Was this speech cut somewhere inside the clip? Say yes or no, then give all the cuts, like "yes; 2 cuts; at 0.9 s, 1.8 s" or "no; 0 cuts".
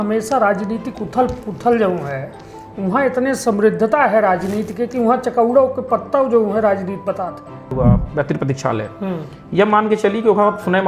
yes; 1 cut; at 7.7 s